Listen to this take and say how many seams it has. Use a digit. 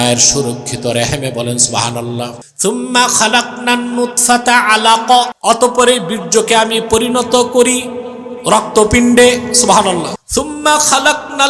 3